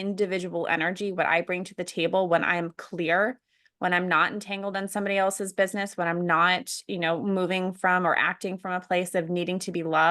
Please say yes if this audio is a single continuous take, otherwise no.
yes